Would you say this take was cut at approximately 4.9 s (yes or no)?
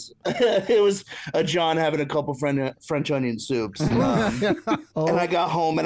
yes